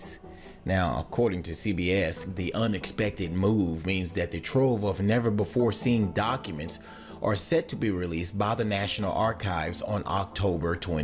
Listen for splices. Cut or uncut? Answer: cut